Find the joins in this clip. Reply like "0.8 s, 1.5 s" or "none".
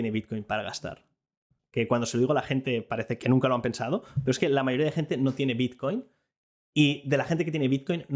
1.5 s, 3.1 s